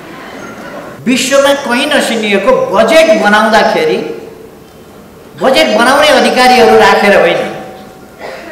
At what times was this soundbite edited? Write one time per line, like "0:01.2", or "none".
0:01.0